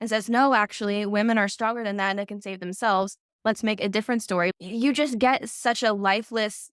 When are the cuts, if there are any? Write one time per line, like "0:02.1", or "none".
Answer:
0:04.5